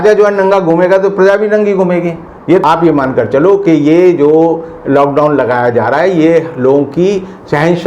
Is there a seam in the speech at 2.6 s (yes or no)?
yes